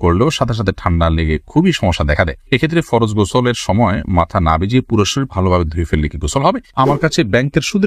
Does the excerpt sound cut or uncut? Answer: cut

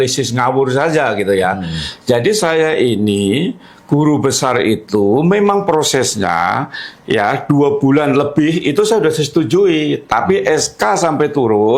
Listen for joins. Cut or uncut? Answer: uncut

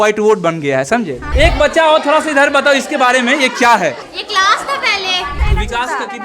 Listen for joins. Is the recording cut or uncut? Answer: cut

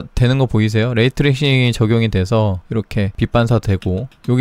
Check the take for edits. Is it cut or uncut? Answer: cut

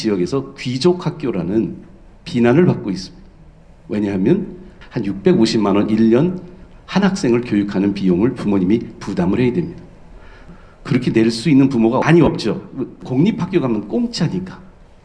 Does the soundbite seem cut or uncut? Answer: cut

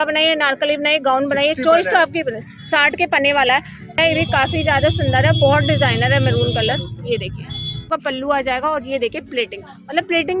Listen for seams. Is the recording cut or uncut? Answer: cut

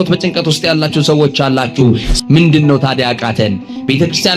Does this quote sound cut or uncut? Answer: cut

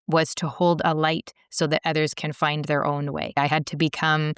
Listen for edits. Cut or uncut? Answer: cut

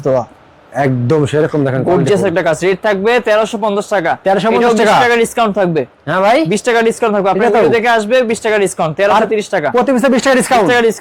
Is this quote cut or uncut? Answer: uncut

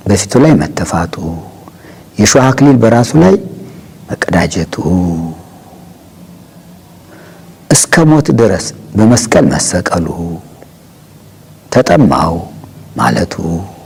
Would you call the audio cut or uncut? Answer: uncut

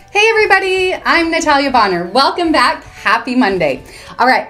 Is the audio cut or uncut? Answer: uncut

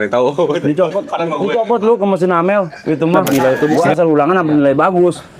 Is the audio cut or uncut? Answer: cut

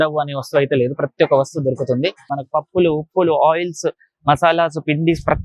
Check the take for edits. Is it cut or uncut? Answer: cut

